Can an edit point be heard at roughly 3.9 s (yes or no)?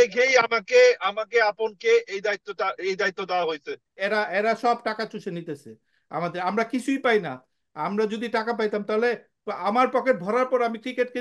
yes